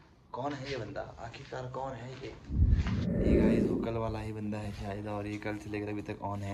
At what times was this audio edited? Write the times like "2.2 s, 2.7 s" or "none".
2.4 s, 3.8 s

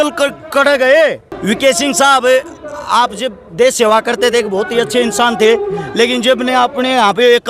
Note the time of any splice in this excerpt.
1.3 s

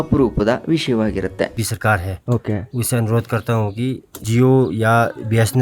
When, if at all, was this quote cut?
1.5 s, 4.2 s

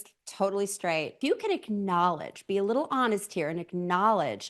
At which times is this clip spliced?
1.2 s

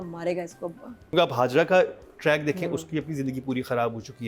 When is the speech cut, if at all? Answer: 1.1 s

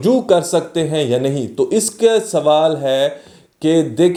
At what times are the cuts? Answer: none

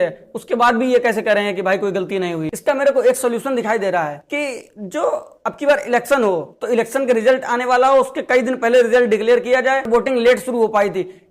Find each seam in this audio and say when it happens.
2.5 s, 9.9 s

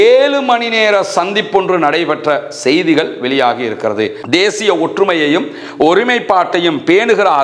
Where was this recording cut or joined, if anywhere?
4.2 s

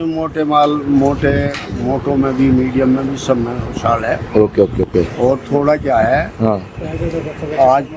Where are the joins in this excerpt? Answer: none

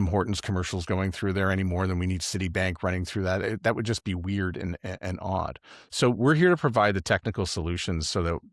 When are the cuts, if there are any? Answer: none

